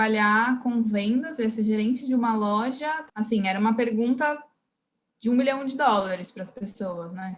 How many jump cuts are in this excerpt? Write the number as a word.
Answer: one